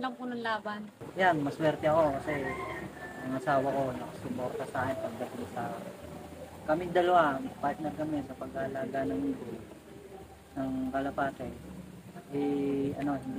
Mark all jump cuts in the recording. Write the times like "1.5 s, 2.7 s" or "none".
1.0 s